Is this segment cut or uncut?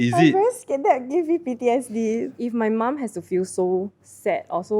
cut